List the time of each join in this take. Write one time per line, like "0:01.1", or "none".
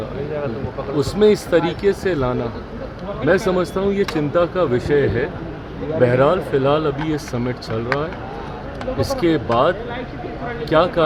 none